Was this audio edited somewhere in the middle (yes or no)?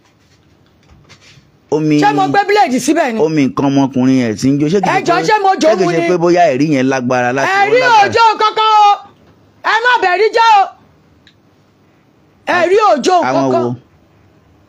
no